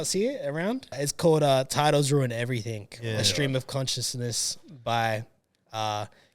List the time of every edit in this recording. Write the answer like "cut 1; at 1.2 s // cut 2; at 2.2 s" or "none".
cut 1; at 1.1 s